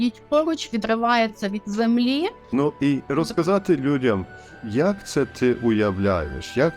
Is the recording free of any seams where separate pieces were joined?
no; 1 cut; at 2.4 s

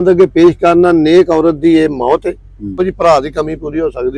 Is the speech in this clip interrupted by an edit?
yes; 1 cut; at 2.7 s

